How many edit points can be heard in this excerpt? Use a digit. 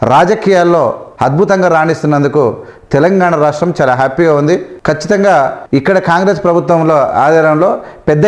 3